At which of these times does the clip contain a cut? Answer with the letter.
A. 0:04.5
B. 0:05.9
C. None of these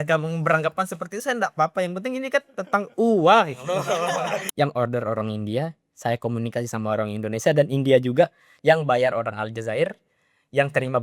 A